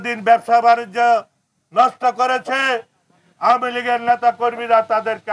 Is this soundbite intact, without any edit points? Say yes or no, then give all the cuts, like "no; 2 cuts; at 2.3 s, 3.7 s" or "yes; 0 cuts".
yes; 0 cuts